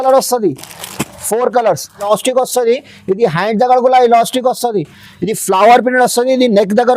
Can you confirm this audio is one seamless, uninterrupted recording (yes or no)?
no